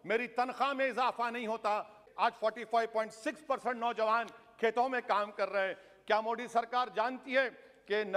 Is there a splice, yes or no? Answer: yes